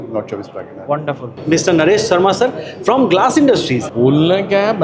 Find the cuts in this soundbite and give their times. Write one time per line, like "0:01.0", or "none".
0:01.4
0:03.8